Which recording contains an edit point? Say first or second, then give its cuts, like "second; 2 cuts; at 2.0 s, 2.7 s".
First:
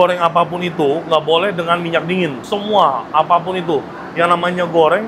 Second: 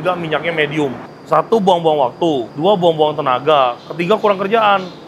second; 1 cut; at 1.1 s